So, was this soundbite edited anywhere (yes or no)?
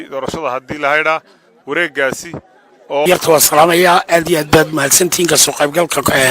yes